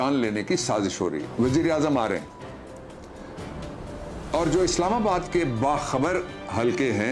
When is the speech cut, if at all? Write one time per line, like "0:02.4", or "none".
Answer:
0:01.3